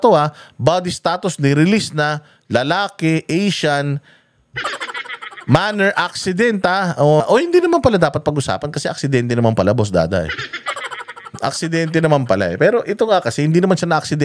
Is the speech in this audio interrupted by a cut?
yes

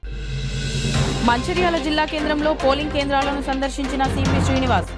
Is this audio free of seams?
no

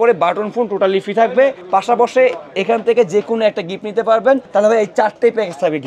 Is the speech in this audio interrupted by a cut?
yes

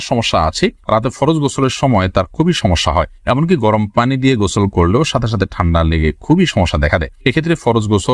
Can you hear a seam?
no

